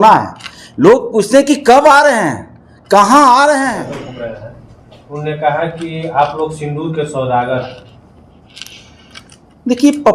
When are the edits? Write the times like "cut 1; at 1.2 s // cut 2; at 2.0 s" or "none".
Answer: cut 1; at 3.9 s